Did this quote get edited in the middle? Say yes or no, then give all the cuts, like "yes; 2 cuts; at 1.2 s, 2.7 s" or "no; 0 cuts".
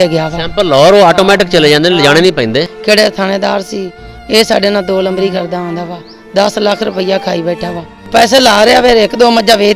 yes; 2 cuts; at 2.7 s, 8.1 s